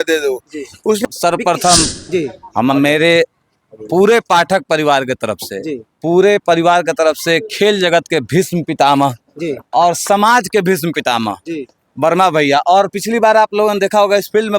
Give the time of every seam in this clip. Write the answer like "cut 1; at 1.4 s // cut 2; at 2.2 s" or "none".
cut 1; at 1.0 s